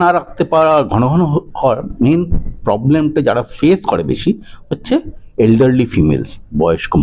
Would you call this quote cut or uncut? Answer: uncut